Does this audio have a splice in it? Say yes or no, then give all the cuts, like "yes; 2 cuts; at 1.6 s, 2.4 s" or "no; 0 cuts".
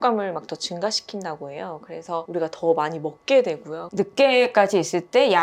yes; 1 cut; at 3.9 s